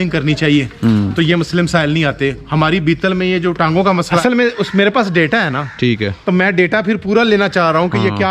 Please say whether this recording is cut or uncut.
cut